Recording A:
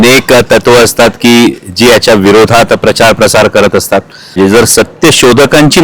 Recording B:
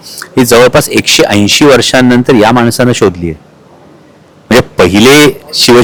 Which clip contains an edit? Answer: A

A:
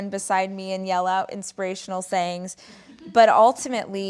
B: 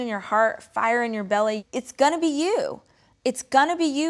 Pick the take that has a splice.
B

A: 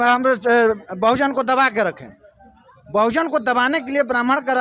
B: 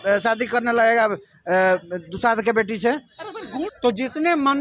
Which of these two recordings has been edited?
B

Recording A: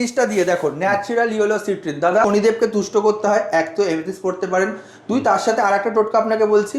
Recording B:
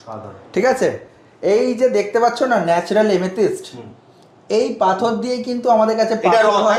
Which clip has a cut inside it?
A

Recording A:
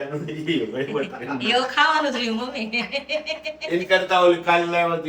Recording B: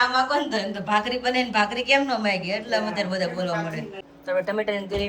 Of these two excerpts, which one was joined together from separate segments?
B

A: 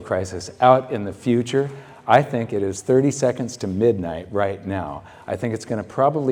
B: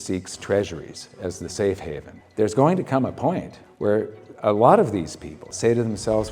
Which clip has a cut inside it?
B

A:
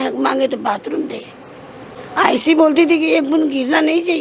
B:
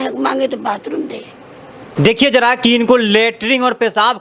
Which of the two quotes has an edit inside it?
B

